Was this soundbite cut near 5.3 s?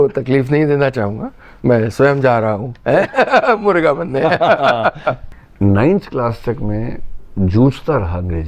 yes; 1 cut; at 5.3 s

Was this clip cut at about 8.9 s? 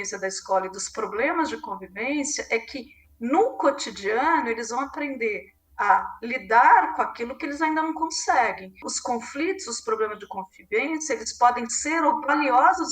yes; 1 cut; at 8.9 s

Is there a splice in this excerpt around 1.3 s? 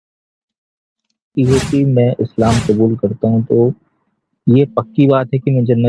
yes; 1 cut; at 1.3 s

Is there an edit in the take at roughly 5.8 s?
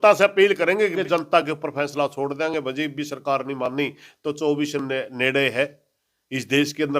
no; 1 cut; at 1.0 s

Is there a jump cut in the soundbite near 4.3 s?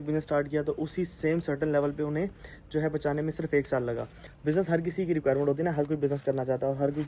yes; 1 cut; at 4.3 s

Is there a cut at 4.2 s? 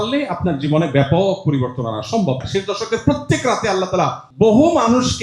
yes; 2 cuts; at 2.4 s, 4.2 s

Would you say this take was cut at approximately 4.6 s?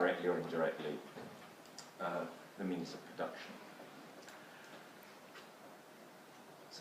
yes; 1 cut; at 4.6 s

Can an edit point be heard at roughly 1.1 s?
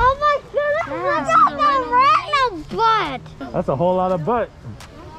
no; 1 cut; at 3.3 s

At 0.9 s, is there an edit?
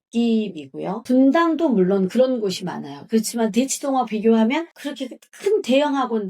yes; 1 cut; at 0.9 s

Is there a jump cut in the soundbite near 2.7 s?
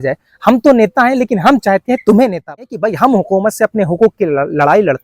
yes; 1 cut; at 2.7 s

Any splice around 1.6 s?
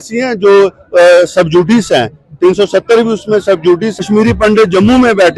no; 1 cut; at 3.9 s

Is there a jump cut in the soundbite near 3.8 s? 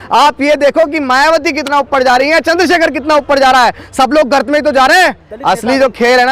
no; 1 cut; at 5.3 s

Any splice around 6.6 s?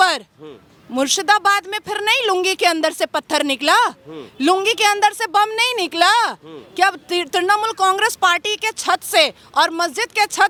no; 0 cuts

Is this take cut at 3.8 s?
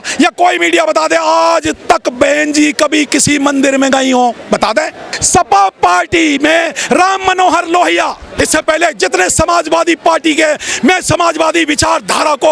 no; 1 cut; at 5.1 s

